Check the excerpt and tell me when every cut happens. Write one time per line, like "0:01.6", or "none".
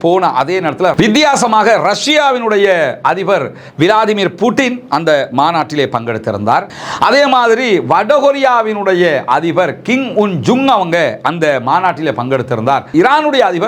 0:06.8
0:12.9